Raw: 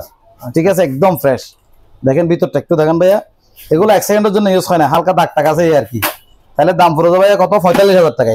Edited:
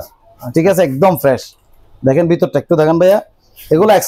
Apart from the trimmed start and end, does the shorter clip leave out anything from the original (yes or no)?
no